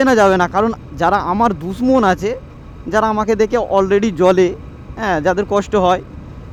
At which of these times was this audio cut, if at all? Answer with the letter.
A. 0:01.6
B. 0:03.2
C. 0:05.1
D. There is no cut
D